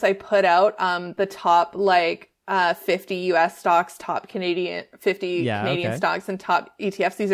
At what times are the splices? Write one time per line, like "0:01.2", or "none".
none

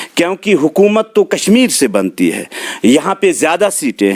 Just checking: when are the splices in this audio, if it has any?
none

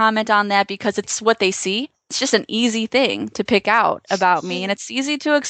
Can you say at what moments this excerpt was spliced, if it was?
0:01.1
0:02.2

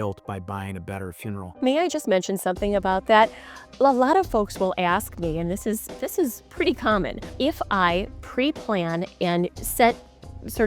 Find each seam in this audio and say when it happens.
0:03.7

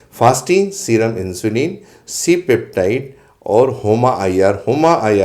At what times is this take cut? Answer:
none

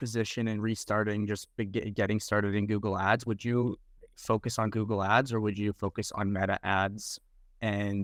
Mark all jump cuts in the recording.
none

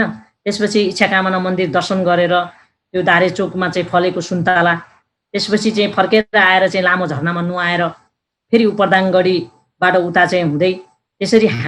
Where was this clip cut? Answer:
none

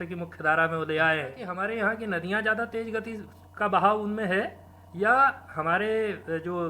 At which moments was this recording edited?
0:01.5

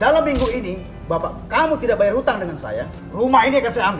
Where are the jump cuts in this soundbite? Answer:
0:03.0

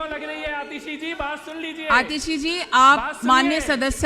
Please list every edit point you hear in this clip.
none

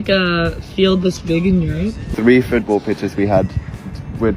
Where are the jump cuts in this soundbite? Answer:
0:02.1

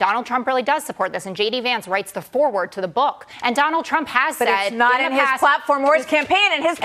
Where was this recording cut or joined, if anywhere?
0:03.3

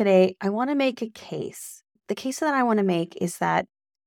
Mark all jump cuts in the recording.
0:02.0

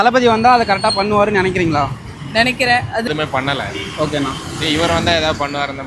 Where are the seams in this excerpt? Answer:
0:03.1

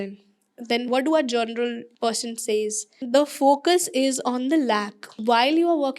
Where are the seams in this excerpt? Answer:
0:00.9
0:01.9
0:03.0
0:05.1

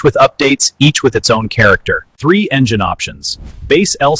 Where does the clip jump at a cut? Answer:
0:02.1

